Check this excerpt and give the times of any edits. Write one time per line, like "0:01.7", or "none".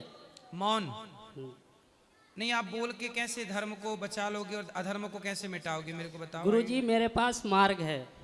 none